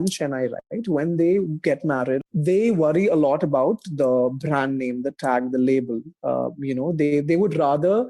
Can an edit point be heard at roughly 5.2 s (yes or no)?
no